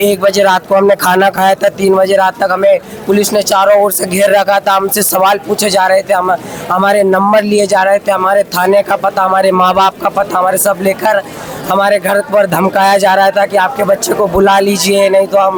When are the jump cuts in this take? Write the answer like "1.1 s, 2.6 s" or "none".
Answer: none